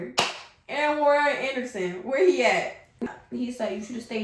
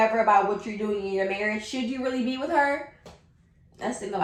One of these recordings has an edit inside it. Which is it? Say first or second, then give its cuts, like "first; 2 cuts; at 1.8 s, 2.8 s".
first; 1 cut; at 3.1 s